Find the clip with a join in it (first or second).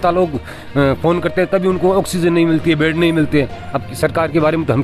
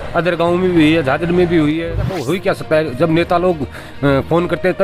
second